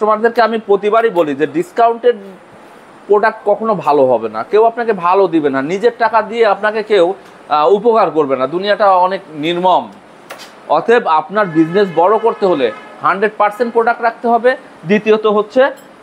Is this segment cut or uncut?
uncut